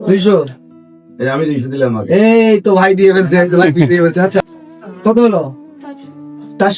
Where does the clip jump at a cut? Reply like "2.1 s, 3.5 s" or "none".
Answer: 4.5 s